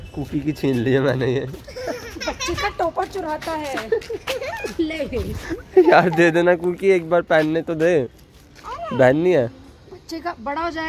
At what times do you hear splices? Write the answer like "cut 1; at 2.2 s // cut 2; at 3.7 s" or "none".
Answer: none